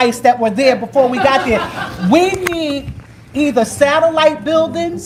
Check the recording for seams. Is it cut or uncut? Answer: uncut